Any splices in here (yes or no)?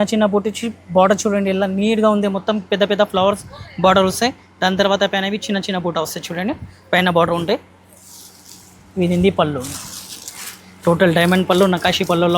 no